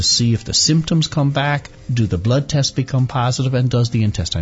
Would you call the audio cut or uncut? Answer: cut